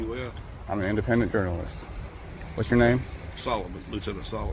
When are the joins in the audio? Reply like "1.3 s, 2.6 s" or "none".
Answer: none